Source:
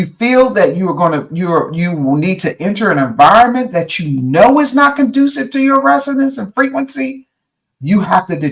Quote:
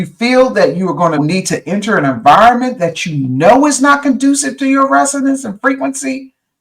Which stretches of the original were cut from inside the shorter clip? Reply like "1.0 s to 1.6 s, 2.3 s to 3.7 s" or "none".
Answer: 1.2 s to 2.1 s